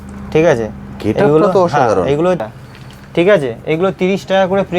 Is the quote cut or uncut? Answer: cut